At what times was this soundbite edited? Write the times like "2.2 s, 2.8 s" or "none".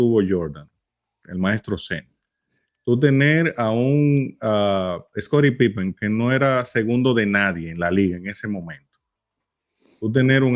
none

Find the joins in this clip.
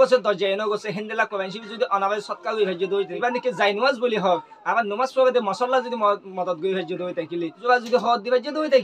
3.1 s, 7.6 s

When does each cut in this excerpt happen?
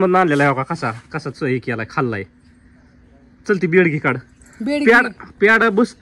none

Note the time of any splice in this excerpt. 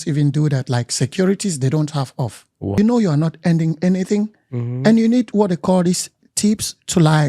2.8 s

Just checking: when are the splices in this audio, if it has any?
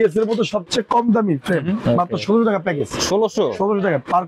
1.8 s

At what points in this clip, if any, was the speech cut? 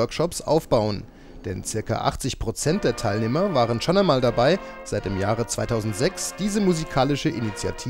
none

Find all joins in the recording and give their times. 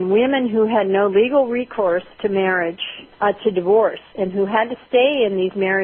1.1 s

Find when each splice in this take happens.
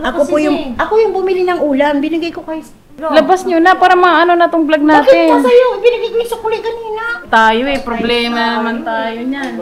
2.9 s, 7.2 s

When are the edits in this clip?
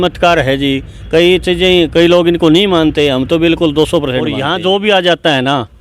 4.4 s

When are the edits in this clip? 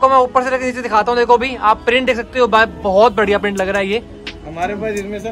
none

